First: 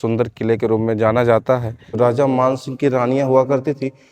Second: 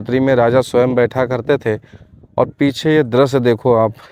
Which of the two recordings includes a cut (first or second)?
first